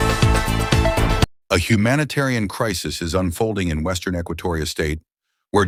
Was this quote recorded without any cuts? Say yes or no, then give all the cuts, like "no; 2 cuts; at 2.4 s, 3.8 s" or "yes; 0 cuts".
yes; 0 cuts